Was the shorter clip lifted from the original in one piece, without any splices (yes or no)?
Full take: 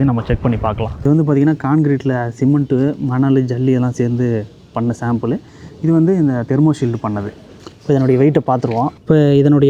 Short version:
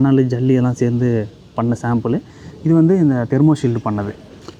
yes